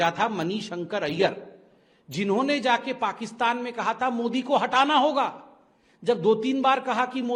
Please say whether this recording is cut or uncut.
uncut